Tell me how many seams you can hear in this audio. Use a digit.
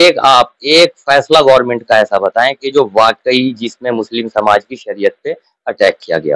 0